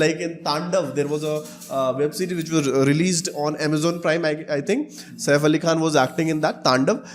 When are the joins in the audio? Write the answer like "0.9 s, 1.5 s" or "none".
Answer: none

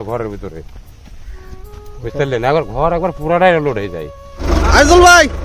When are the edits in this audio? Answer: 4.4 s

